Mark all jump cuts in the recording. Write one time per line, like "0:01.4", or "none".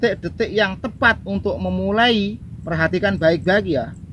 0:02.5

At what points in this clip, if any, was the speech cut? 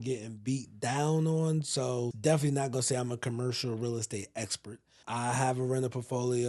0:02.1
0:05.0

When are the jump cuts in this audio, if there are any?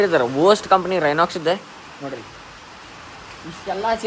none

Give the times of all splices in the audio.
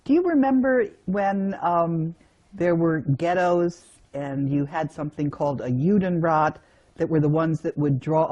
0:04.9

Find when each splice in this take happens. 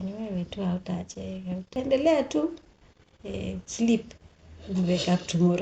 0:01.7

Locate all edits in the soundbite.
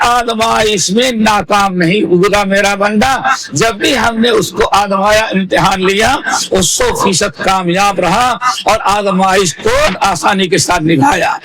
0:09.9

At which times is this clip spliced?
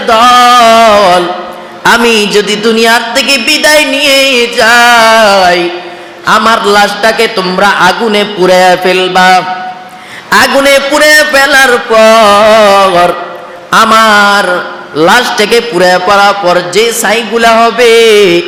none

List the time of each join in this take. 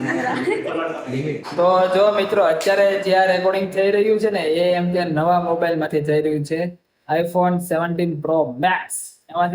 0:01.4

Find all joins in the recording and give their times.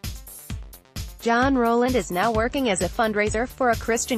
0:01.1

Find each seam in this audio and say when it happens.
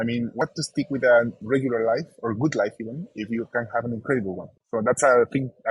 0:04.5

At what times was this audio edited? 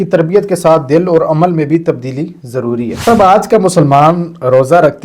0:03.0

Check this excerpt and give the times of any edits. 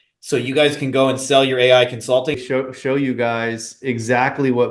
0:02.4

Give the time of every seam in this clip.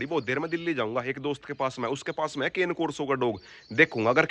none

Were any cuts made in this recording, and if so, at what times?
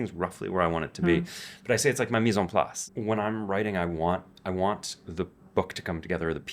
0:02.8

